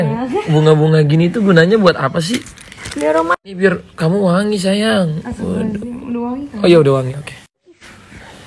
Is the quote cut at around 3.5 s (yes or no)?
yes